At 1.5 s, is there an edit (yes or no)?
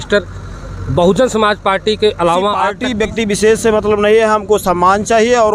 no